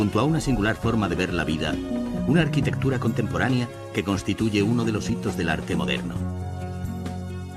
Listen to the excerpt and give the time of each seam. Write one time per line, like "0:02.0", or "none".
0:03.6